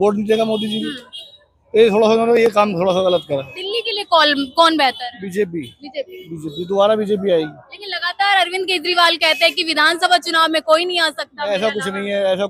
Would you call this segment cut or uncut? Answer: uncut